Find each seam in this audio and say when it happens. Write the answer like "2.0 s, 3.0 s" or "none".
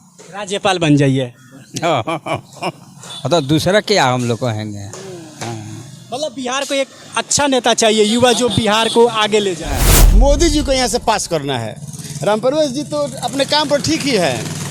10.0 s